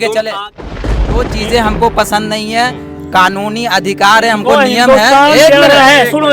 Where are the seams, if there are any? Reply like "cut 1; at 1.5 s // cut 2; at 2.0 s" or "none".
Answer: cut 1; at 1.0 s